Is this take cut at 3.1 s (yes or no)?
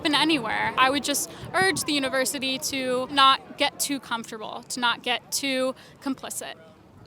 yes